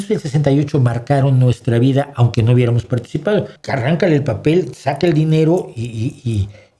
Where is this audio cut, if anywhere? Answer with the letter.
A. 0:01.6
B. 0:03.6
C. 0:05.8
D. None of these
B